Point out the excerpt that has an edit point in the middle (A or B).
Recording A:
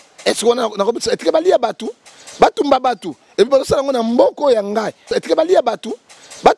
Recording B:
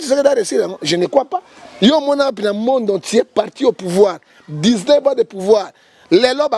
A